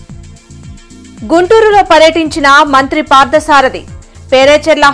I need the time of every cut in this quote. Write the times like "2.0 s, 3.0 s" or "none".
1.1 s